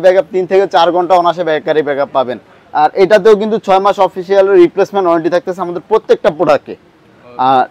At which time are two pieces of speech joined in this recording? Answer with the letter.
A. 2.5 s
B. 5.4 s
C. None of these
C